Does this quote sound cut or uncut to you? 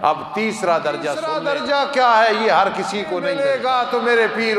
cut